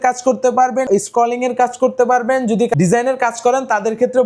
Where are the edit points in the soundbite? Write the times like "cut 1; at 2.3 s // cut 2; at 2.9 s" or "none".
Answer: cut 1; at 0.9 s // cut 2; at 2.7 s